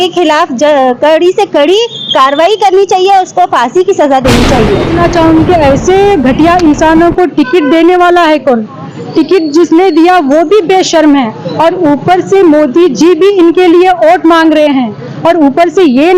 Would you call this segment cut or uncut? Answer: cut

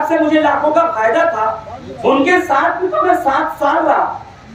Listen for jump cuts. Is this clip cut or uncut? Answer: uncut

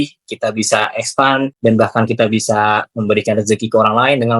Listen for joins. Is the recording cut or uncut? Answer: cut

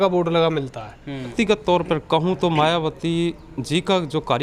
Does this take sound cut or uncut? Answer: cut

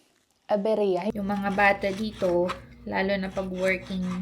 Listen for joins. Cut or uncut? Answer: cut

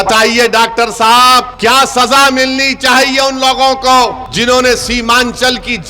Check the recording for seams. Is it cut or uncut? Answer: cut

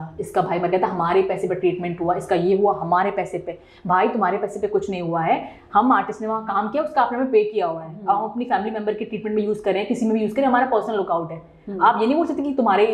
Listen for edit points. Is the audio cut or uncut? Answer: uncut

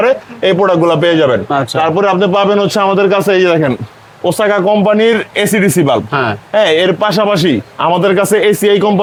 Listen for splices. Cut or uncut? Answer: uncut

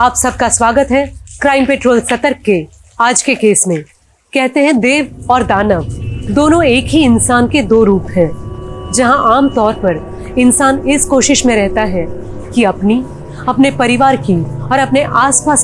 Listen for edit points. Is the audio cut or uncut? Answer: uncut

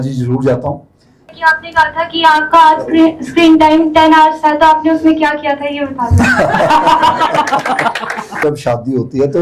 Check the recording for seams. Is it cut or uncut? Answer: cut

